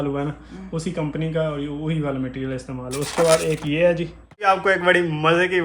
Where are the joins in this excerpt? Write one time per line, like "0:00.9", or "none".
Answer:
0:04.5

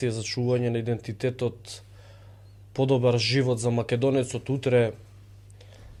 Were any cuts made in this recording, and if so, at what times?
none

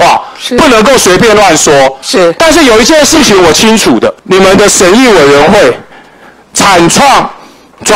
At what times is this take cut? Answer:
0:04.2

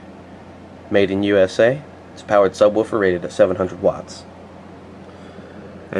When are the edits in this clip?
0:01.2

